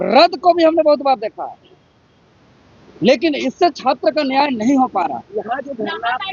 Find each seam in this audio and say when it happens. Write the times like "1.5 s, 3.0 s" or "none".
none